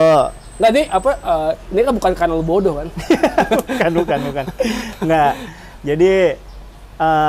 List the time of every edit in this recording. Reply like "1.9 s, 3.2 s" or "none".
none